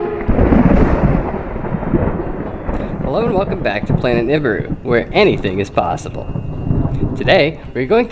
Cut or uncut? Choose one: cut